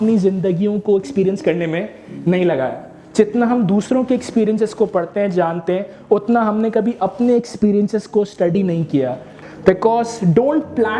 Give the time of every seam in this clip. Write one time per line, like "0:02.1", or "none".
0:09.3